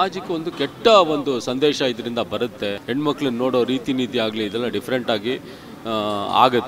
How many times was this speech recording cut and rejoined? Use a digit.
1